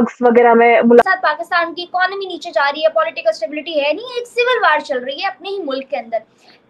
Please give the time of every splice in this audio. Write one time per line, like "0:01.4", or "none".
0:01.0